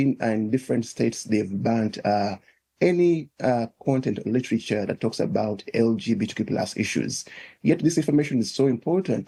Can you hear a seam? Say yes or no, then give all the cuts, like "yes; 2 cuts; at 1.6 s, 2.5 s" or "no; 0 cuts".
no; 0 cuts